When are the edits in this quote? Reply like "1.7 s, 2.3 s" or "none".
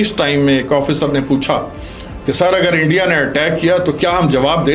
none